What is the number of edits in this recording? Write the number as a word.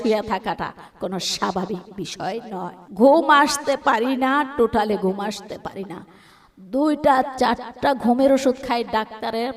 one